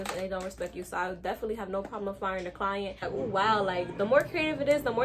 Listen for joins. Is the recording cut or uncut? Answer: cut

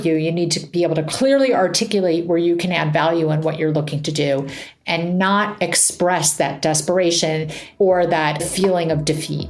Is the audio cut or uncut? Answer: cut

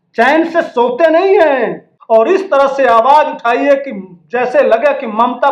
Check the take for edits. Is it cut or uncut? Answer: cut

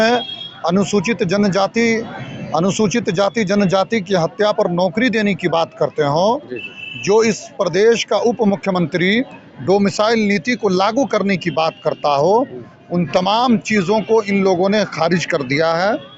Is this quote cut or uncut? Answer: uncut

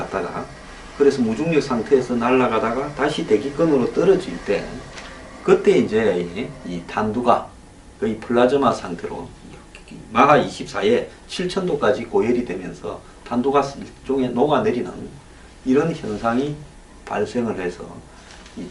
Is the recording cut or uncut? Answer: cut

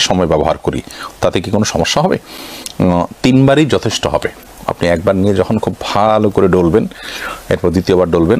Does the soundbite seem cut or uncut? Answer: uncut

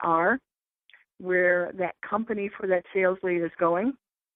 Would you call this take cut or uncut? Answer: uncut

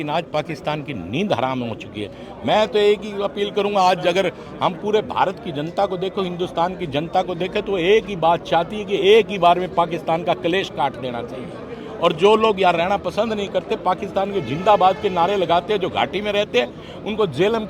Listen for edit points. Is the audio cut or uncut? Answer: uncut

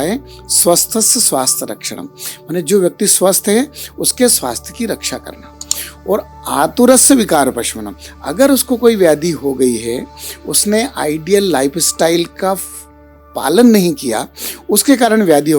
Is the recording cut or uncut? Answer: uncut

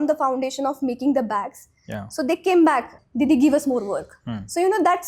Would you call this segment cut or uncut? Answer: cut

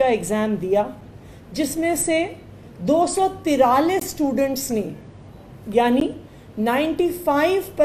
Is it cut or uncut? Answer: uncut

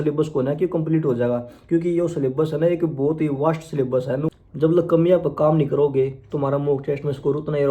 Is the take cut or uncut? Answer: cut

